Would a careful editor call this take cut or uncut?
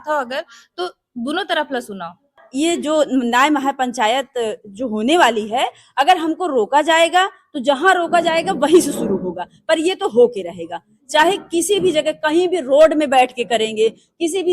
cut